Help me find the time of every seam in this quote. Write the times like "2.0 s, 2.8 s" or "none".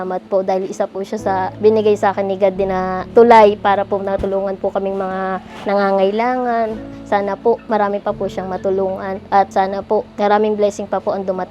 none

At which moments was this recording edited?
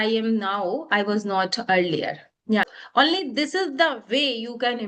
2.7 s

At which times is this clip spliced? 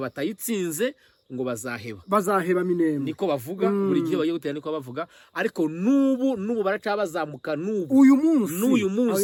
none

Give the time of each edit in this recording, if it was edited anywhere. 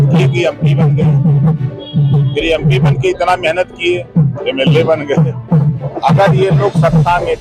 5.8 s

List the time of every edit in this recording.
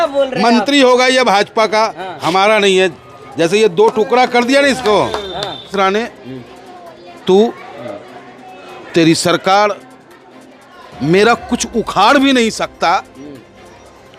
5.7 s

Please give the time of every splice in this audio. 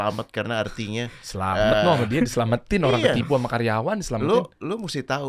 none

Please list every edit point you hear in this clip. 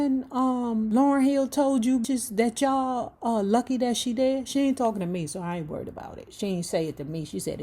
0.9 s, 2.0 s

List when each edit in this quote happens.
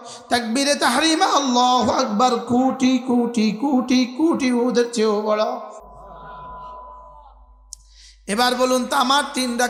none

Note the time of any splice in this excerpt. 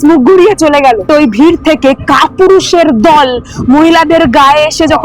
1.1 s

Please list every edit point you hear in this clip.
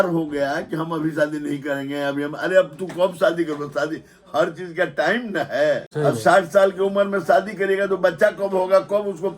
5.9 s

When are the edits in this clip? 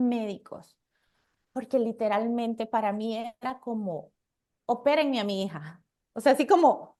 none

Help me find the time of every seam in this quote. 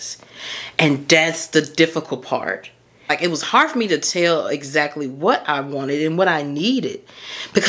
3.1 s

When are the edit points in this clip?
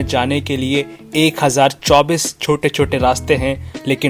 none

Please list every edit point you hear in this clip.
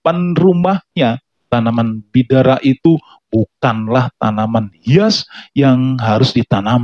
1.3 s

